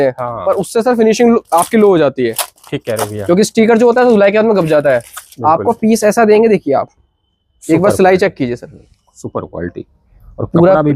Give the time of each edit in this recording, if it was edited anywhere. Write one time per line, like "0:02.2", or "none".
none